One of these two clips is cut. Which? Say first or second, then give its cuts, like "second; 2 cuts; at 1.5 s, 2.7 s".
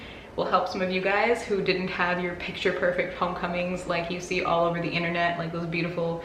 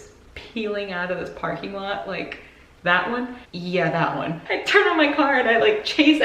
second; 2 cuts; at 3.4 s, 4.4 s